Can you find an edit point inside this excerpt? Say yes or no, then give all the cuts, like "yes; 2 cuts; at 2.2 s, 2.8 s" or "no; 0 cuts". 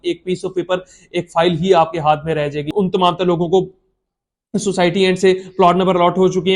yes; 1 cut; at 2.7 s